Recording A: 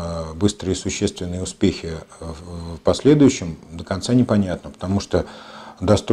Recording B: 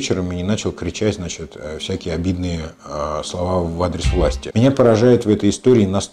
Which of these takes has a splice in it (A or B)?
B